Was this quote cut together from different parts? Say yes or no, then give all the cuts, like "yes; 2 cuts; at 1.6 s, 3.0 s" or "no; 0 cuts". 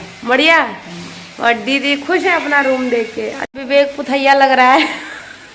yes; 1 cut; at 3.5 s